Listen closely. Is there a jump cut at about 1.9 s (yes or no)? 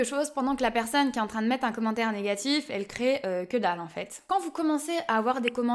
no